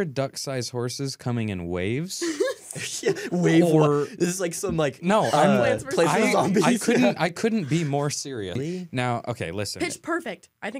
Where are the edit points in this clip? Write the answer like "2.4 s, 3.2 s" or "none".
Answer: 8.6 s